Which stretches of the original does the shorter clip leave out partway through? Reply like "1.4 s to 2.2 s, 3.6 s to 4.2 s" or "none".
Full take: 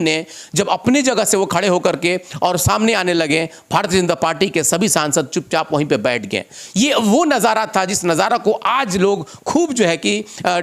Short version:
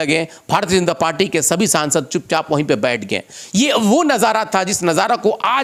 none

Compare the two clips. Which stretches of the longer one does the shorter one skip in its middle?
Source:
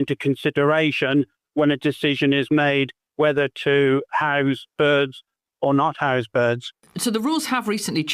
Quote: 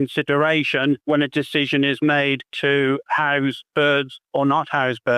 1.3 s to 1.5 s, 3.0 s to 3.6 s, 5.2 s to 5.5 s

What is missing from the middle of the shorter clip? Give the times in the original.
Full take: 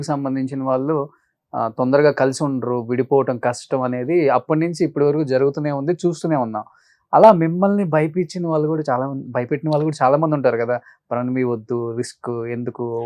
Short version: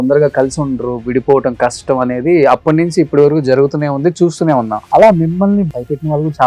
6.6 s to 7.0 s, 7.9 s to 9.3 s

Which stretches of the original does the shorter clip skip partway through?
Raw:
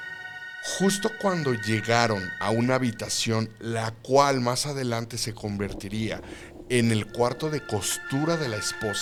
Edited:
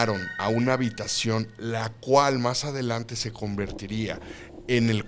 none

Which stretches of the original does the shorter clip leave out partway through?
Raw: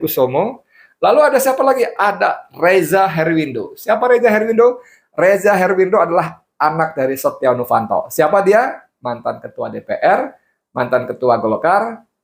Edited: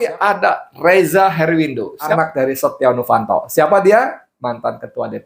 3.9 s to 6.7 s

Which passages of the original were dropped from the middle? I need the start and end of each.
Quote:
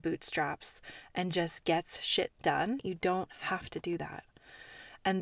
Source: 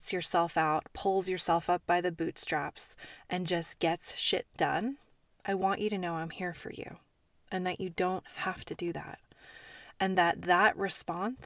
5.0 s to 7.8 s

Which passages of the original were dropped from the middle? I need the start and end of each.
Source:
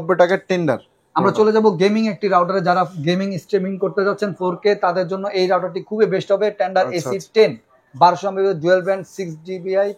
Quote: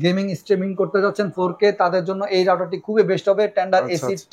none

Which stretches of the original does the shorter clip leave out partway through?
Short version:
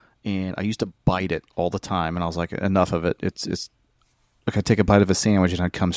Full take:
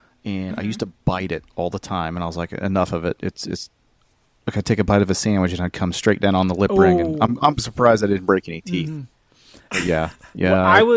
none

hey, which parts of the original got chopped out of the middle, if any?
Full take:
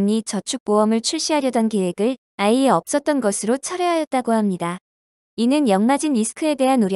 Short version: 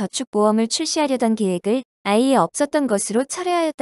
none

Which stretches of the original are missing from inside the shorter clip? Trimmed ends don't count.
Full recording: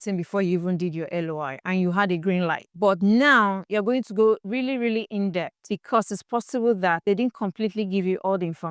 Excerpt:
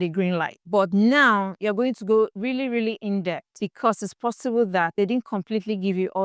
none

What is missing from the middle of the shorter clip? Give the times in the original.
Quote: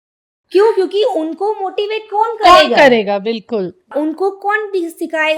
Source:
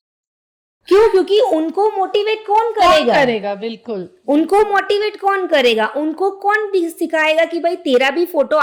4.2 s to 5.8 s

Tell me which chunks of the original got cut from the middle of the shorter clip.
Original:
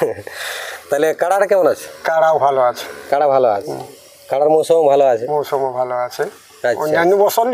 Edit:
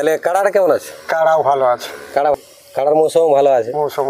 3.3 s to 3.9 s

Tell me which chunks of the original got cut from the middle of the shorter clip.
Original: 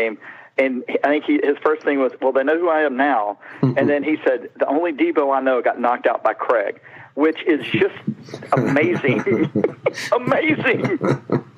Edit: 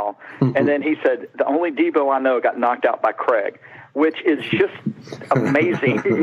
none

